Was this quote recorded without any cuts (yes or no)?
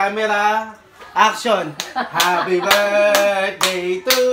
yes